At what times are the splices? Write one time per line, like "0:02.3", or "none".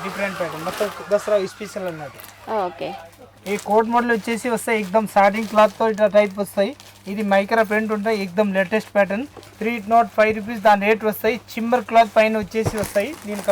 none